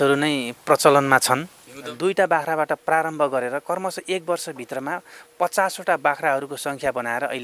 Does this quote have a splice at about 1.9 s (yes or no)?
yes